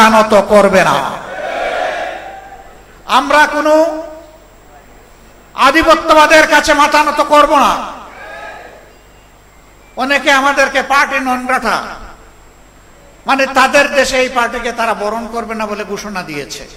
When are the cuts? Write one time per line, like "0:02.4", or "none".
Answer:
none